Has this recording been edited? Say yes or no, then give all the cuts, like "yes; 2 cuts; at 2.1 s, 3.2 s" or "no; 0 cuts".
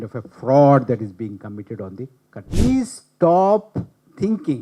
yes; 1 cut; at 2.5 s